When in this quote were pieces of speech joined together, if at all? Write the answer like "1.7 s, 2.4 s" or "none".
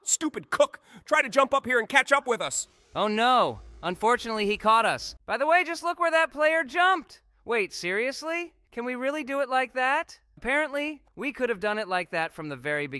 5.1 s, 10.2 s